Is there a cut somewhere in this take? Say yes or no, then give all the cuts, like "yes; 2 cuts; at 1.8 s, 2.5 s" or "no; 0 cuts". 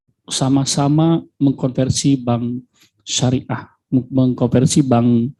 no; 0 cuts